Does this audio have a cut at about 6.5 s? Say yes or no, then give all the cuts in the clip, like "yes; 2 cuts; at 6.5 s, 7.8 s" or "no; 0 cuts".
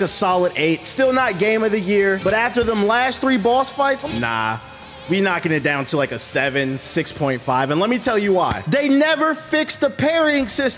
no; 3 cuts; at 2.2 s, 4.0 s, 8.6 s